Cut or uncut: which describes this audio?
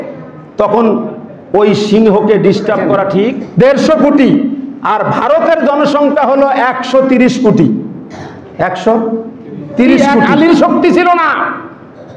cut